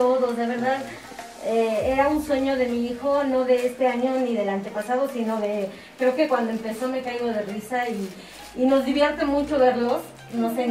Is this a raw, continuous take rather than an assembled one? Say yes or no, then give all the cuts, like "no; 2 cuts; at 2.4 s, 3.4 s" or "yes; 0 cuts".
yes; 0 cuts